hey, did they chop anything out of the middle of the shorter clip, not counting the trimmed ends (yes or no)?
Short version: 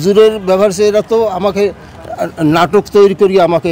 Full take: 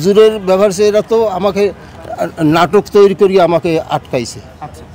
no